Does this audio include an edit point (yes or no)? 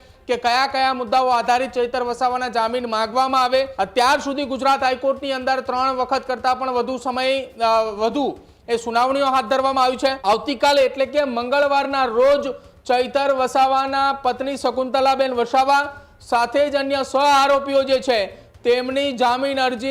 yes